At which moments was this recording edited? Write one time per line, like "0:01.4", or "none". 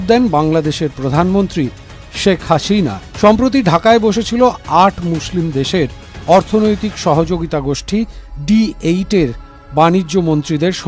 none